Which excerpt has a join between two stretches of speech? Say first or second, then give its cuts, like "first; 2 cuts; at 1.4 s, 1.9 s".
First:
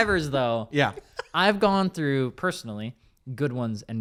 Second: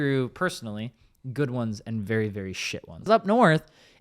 second; 1 cut; at 3.1 s